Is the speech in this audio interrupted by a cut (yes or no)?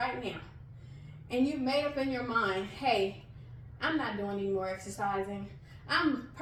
no